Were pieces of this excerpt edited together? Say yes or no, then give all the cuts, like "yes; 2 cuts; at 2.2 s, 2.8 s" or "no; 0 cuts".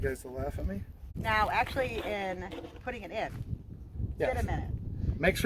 yes; 1 cut; at 1.0 s